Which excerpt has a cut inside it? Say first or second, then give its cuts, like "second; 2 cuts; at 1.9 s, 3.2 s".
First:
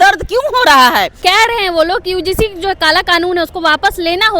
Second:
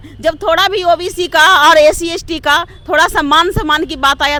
first; 1 cut; at 1.1 s